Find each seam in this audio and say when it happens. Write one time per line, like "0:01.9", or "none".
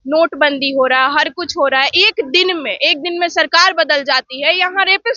none